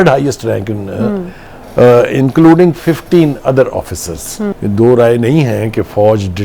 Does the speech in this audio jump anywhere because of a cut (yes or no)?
yes